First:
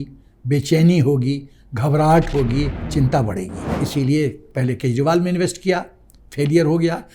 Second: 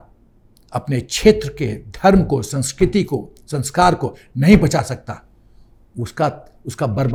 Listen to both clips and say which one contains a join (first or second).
first